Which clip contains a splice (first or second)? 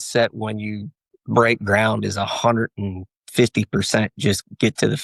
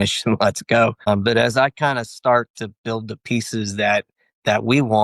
second